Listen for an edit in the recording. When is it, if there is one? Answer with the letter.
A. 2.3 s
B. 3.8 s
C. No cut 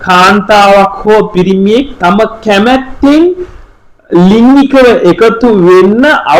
C